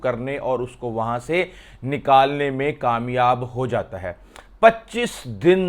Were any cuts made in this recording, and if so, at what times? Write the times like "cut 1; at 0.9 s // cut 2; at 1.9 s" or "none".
none